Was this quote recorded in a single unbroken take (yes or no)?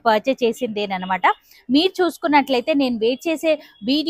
yes